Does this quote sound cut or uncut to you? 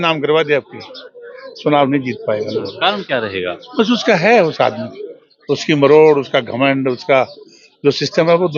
uncut